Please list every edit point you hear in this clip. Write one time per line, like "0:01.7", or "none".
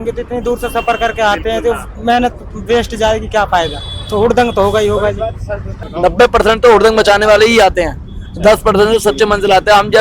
0:05.9